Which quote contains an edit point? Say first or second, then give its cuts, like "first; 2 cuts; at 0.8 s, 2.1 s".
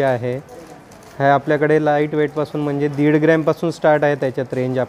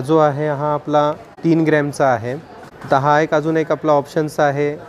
second; 1 cut; at 1.3 s